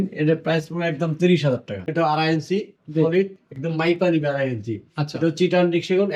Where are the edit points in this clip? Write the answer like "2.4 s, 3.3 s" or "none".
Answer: 1.9 s